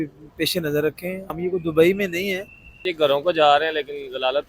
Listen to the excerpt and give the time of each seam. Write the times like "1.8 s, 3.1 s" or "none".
1.3 s, 2.9 s